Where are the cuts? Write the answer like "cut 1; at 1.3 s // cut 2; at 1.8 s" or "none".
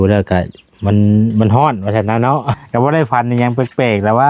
cut 1; at 2.5 s